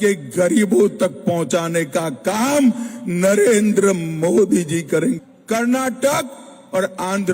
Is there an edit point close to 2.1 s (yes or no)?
no